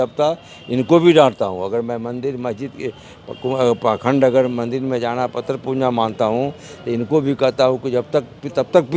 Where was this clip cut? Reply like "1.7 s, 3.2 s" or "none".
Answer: none